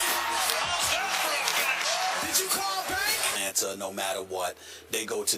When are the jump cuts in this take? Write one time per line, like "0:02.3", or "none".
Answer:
none